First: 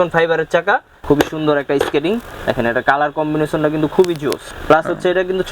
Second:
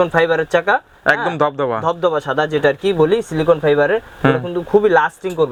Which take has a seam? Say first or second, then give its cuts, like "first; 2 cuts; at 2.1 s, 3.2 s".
first; 2 cuts; at 0.9 s, 4.5 s